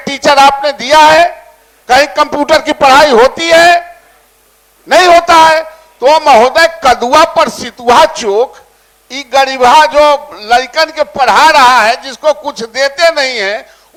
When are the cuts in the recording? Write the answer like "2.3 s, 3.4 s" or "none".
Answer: none

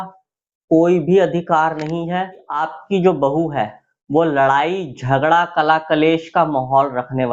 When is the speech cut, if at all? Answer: 2.7 s

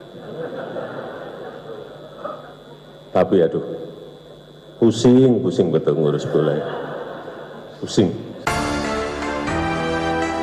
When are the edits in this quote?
8.4 s

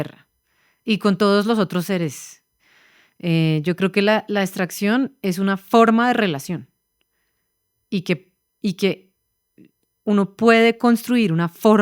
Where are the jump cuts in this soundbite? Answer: none

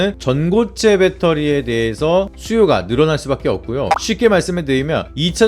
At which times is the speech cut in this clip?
4.0 s

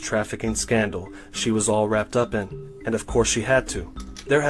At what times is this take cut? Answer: 3.1 s

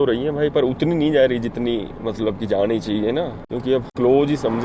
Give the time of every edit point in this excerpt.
none

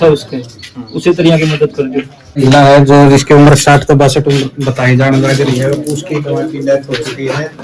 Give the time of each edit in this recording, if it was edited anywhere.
2.4 s

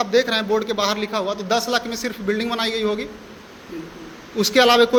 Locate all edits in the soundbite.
none

